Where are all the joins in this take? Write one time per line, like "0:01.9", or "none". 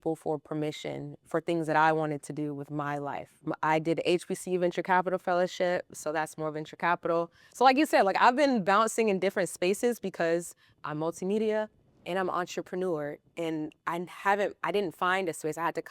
0:03.5